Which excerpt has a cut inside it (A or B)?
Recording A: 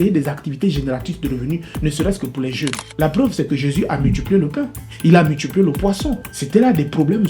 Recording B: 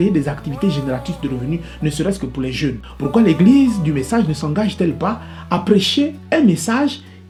A